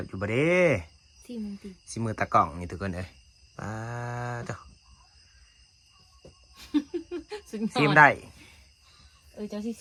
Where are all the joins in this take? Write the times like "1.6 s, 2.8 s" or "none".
none